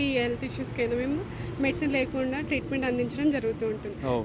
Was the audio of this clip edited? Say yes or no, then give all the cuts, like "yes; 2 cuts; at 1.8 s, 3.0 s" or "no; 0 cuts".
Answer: no; 0 cuts